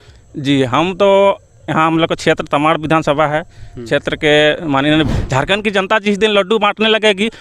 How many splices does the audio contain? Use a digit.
1